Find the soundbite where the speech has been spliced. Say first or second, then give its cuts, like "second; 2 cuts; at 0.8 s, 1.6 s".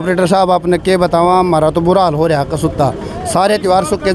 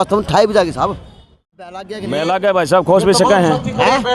second; 1 cut; at 1.4 s